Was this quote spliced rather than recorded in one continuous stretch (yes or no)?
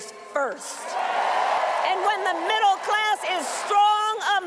yes